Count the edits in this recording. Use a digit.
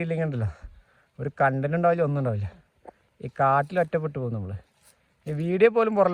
0